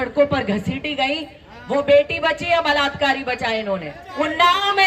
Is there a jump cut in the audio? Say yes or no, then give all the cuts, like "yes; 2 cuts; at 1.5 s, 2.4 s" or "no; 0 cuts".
yes; 1 cut; at 4.0 s